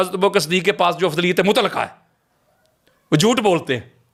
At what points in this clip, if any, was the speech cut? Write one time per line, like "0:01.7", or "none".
none